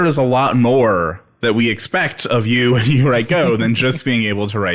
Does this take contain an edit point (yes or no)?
no